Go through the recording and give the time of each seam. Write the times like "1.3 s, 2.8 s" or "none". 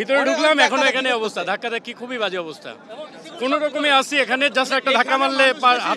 none